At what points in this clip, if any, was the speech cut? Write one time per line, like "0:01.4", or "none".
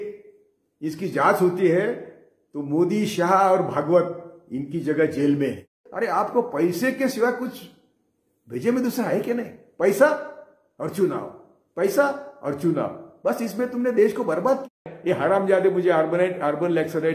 0:05.8
0:14.8